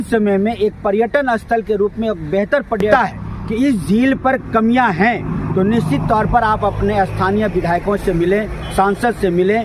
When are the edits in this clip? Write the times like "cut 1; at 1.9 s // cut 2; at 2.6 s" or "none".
cut 1; at 2.9 s

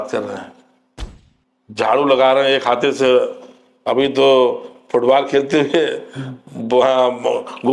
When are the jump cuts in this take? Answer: none

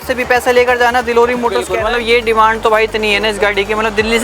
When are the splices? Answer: cut 1; at 1.7 s

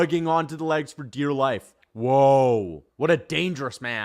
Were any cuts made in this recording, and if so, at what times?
cut 1; at 2.8 s

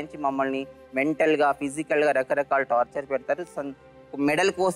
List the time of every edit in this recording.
none

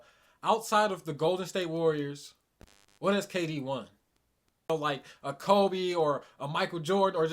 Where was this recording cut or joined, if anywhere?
cut 1; at 4.7 s

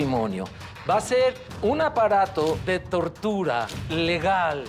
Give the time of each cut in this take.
cut 1; at 1.5 s // cut 2; at 2.6 s // cut 3; at 3.8 s

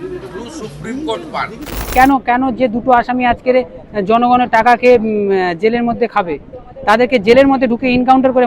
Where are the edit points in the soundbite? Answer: cut 1; at 1.9 s

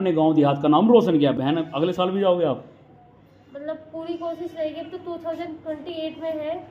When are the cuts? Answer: cut 1; at 1.4 s

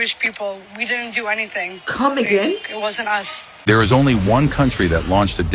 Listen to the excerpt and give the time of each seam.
cut 1; at 3.4 s

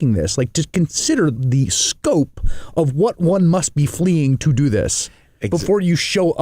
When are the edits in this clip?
cut 1; at 1.3 s

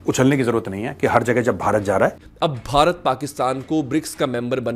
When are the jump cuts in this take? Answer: cut 1; at 2.3 s

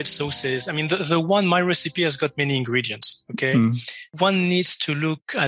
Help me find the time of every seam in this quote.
cut 1; at 4.1 s

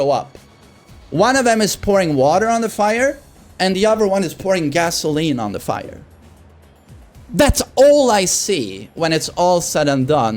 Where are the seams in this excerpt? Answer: none

